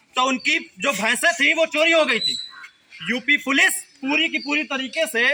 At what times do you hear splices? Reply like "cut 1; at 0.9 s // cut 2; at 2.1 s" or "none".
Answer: none